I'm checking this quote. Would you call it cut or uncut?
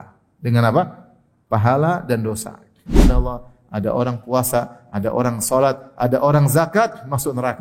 cut